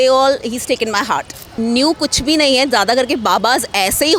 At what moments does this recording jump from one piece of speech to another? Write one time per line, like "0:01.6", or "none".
0:01.5